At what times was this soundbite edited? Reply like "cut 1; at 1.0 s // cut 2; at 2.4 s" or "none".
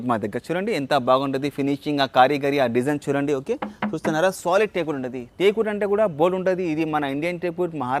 none